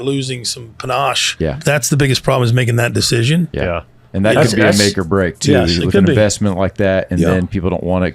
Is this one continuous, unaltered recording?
no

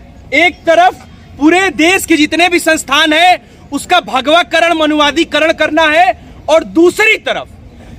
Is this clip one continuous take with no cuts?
yes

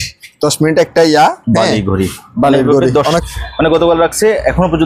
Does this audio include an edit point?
yes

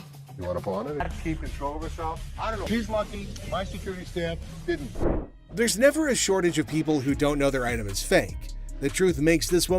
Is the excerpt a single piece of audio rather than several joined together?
no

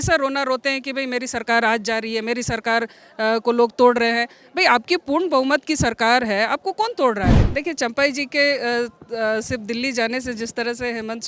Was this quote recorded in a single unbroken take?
no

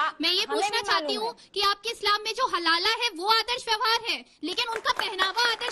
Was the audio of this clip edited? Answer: no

